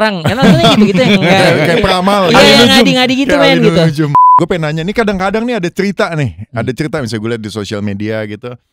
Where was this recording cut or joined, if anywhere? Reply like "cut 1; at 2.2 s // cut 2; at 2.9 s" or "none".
cut 1; at 4.2 s